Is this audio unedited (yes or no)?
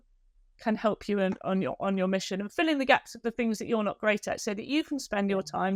yes